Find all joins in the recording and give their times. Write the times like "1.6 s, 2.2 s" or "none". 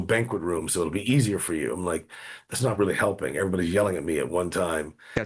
none